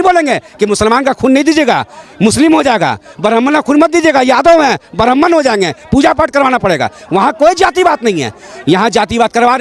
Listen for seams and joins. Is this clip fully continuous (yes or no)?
yes